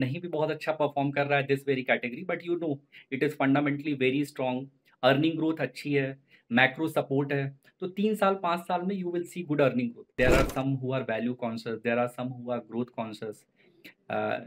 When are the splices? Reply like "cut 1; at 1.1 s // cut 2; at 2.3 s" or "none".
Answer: cut 1; at 10.1 s